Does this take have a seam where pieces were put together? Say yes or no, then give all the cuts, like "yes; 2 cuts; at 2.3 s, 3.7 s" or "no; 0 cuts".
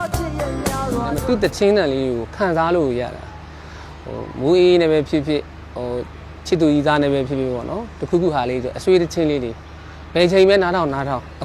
yes; 1 cut; at 1.1 s